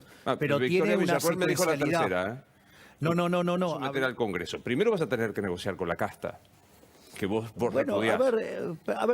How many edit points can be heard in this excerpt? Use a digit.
1